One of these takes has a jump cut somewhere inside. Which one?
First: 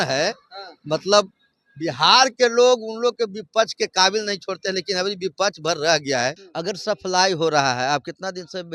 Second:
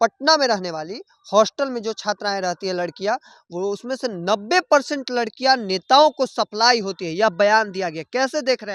first; 1 cut; at 6.4 s

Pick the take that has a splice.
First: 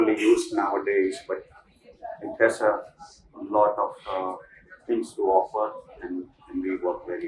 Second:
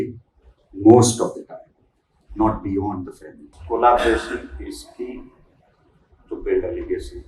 second; 1 cut; at 3.5 s

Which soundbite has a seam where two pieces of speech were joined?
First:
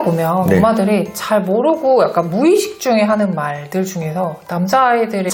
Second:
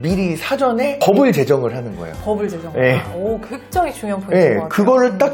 second; 1 cut; at 1.0 s

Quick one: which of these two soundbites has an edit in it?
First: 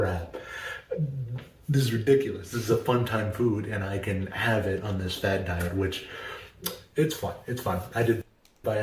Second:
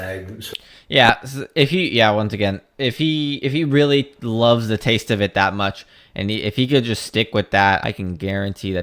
second; 1 cut; at 7.8 s

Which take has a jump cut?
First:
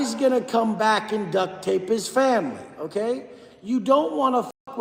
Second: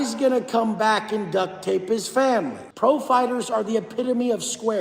second; 1 cut; at 2.6 s

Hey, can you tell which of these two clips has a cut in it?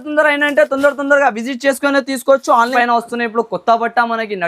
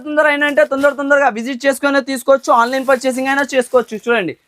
first; 1 cut; at 2.7 s

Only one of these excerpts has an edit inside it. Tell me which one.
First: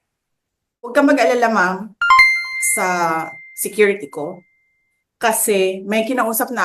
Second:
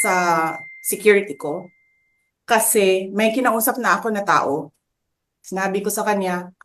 first; 1 cut; at 0.9 s

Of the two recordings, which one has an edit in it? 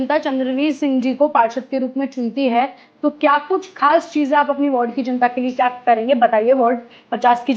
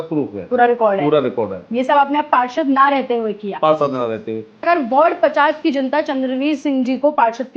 second; 1 cut; at 4.6 s

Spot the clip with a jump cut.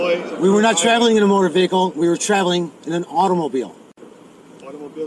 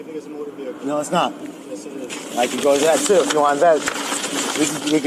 first; 1 cut; at 4.2 s

